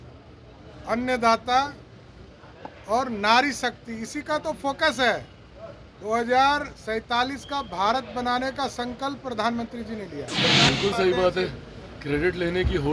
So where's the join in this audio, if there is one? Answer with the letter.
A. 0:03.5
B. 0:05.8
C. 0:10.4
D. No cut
C